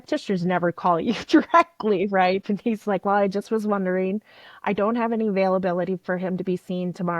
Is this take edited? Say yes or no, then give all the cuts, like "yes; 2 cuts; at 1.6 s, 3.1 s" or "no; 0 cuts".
yes; 1 cut; at 2.4 s